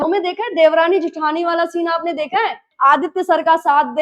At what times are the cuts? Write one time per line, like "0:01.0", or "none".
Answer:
0:02.6